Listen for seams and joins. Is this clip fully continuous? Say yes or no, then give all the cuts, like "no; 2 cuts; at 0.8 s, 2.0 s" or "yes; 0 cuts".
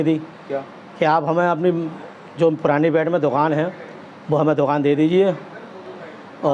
yes; 0 cuts